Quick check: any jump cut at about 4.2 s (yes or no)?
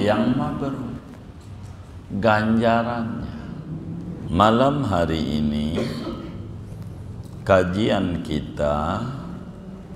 yes